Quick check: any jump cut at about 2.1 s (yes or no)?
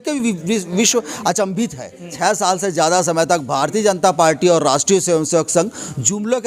yes